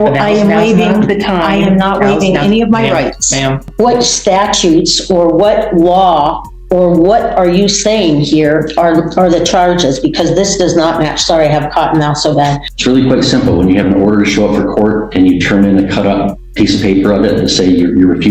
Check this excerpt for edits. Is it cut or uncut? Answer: cut